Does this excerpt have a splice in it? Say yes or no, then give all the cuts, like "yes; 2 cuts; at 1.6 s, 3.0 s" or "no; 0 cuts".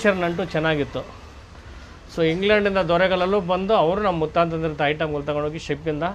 no; 0 cuts